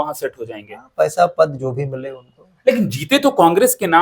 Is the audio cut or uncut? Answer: uncut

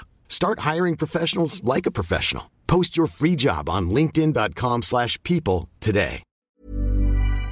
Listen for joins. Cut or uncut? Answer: cut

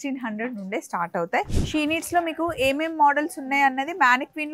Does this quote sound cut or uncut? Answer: cut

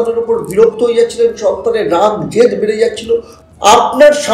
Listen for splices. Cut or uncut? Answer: cut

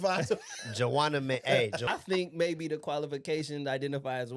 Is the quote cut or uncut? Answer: cut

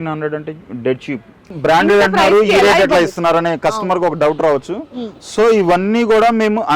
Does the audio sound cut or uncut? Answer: cut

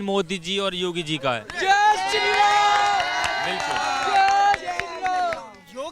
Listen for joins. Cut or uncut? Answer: uncut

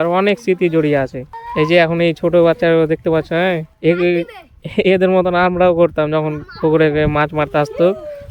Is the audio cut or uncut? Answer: uncut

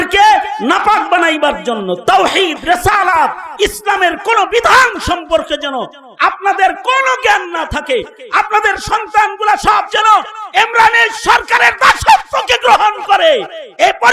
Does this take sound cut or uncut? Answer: uncut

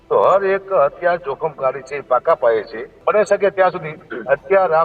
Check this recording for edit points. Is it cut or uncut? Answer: cut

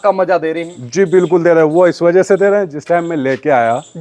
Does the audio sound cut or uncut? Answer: uncut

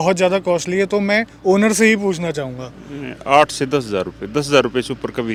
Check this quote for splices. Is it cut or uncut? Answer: uncut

